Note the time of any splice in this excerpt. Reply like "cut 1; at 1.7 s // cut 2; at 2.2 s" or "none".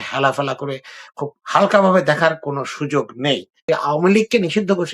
cut 1; at 3.6 s